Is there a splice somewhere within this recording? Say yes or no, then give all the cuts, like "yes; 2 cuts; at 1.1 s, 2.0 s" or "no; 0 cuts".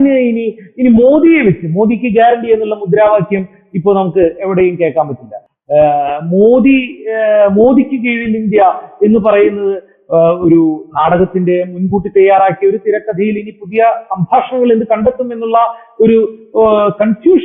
no; 0 cuts